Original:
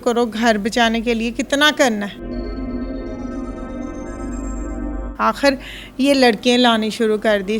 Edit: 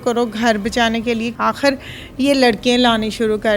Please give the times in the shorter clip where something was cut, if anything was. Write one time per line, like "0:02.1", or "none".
0:01.3